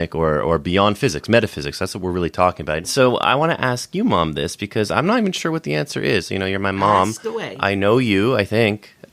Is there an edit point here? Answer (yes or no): yes